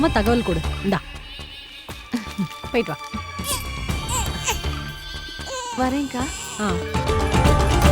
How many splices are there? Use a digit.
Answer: 1